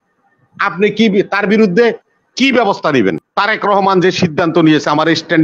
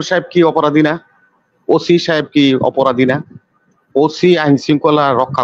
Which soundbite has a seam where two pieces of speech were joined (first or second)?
first